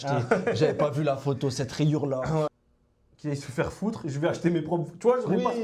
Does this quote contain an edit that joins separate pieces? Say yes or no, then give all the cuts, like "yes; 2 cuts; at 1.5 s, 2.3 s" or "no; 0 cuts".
yes; 1 cut; at 2.5 s